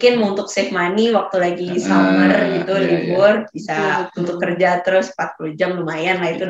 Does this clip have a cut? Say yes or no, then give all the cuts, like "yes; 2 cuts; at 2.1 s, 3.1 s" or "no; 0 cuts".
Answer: no; 0 cuts